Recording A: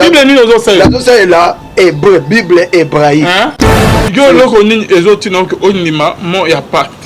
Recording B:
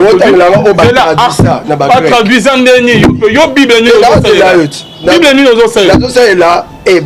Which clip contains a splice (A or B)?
A